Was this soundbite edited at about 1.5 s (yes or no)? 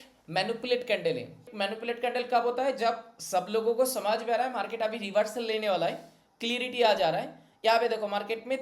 yes